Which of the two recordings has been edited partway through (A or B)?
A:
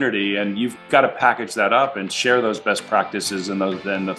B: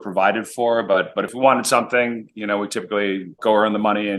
B